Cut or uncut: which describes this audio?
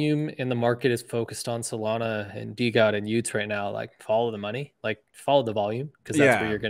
uncut